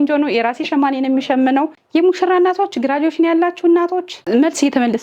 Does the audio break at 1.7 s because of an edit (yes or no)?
yes